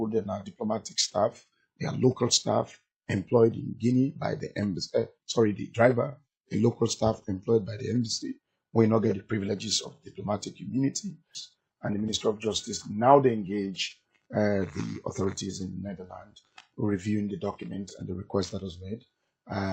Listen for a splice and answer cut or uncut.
cut